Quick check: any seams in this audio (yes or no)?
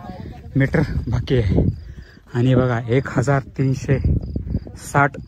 no